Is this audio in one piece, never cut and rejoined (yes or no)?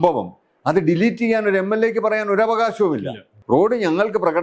no